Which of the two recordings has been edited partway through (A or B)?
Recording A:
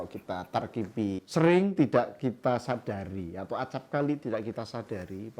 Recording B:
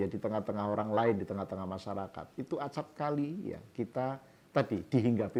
A